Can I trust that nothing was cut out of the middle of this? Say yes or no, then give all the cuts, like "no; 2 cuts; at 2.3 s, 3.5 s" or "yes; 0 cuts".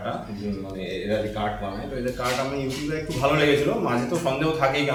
yes; 0 cuts